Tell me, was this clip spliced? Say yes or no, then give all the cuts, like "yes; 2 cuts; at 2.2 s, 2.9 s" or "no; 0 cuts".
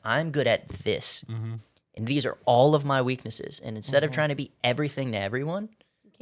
no; 0 cuts